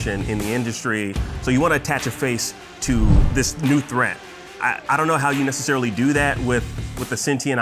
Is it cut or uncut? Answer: uncut